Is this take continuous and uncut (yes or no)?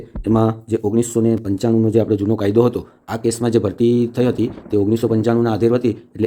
yes